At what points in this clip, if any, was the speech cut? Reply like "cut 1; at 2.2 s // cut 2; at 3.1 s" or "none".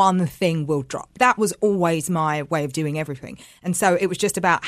cut 1; at 1.1 s